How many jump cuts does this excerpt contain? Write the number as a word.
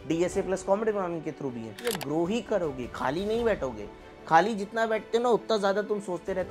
one